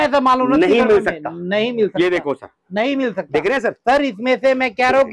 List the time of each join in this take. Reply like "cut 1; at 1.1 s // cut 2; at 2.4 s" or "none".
none